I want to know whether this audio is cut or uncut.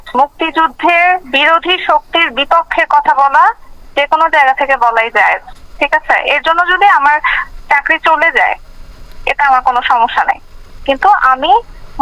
cut